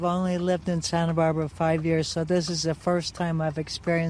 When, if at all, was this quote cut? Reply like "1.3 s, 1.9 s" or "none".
none